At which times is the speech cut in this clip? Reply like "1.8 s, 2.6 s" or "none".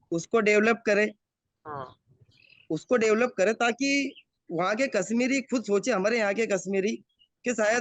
none